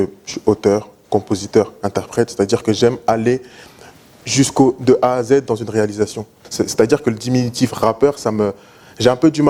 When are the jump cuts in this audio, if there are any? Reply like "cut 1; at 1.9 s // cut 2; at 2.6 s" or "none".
cut 1; at 6.4 s